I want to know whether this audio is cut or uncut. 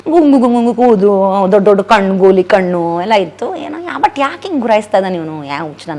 uncut